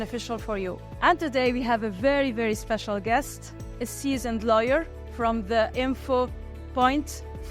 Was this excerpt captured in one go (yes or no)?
yes